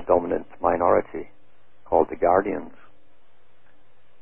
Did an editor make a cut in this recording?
no; 0 cuts

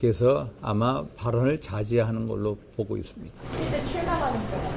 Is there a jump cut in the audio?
yes; 1 cut; at 3.4 s

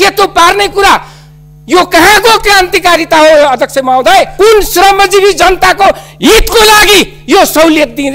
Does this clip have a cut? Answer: yes; 1 cut; at 4.3 s

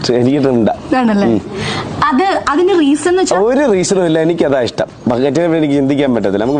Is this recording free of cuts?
yes; 0 cuts

